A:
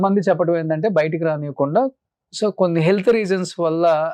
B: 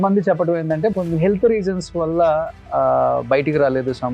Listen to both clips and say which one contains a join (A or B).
B